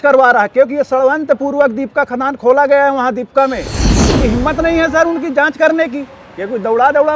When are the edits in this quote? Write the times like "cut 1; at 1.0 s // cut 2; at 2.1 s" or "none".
cut 1; at 3.9 s